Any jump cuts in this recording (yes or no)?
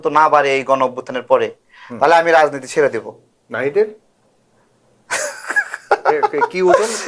no